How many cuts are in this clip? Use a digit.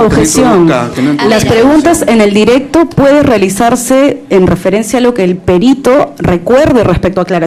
0